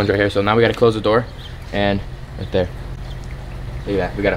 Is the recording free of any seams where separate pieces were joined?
yes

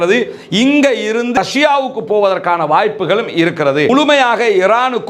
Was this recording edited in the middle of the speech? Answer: yes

